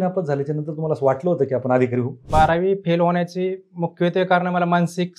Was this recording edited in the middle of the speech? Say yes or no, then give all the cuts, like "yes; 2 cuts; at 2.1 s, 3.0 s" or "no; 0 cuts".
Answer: yes; 1 cut; at 2.2 s